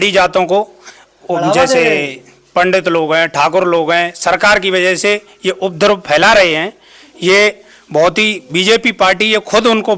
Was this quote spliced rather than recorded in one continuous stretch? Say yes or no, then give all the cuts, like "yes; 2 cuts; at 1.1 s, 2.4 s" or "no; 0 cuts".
no; 0 cuts